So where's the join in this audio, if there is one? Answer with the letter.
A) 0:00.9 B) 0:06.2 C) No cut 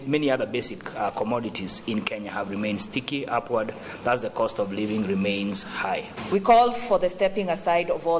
B